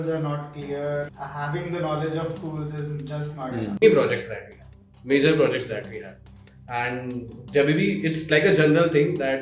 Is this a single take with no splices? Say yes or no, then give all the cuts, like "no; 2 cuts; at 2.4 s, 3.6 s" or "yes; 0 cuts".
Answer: no; 2 cuts; at 1.1 s, 3.8 s